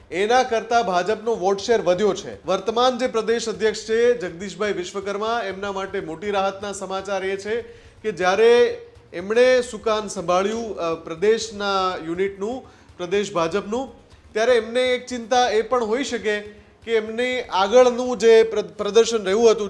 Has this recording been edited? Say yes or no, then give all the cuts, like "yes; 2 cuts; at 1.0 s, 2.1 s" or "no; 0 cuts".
yes; 1 cut; at 2.3 s